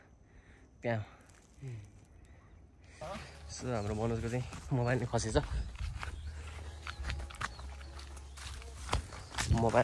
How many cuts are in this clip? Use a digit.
1